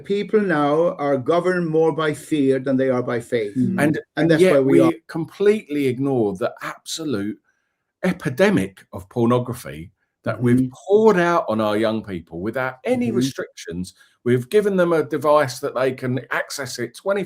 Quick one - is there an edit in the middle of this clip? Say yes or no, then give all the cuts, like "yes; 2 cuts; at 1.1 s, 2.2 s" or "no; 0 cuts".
yes; 1 cut; at 4.0 s